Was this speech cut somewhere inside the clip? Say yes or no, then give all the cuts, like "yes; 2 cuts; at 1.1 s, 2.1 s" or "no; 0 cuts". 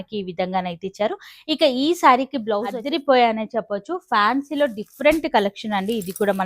yes; 1 cut; at 2.8 s